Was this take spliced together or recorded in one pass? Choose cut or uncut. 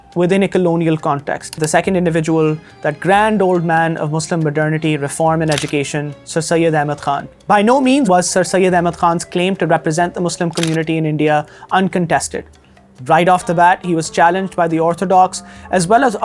cut